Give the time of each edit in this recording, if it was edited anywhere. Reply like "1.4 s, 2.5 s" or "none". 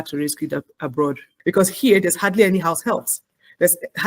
1.3 s

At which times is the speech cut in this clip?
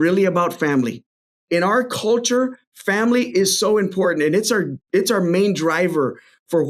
1.3 s

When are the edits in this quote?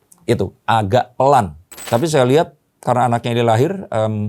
1.8 s

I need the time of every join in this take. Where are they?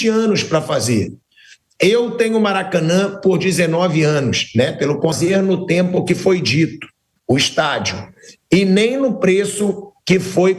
5.2 s

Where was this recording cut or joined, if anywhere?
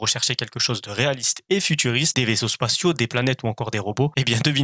none

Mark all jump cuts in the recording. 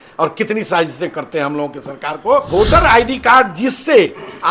2.5 s

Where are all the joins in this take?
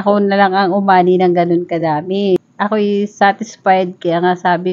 2.4 s

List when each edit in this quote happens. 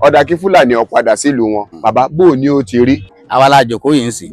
1.9 s, 3.2 s

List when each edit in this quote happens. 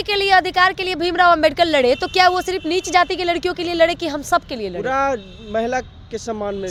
none

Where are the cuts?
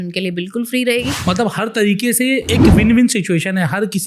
1.1 s, 2.4 s

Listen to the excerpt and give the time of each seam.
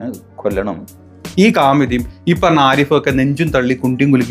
1.0 s

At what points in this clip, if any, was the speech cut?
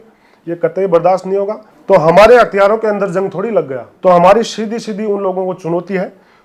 1.7 s, 3.8 s

